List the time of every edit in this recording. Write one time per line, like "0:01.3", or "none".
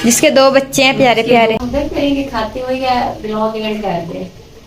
0:01.6